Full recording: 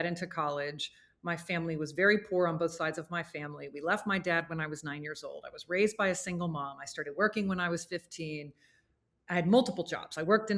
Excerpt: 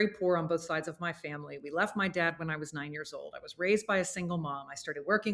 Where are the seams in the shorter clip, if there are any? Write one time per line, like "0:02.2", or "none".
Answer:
none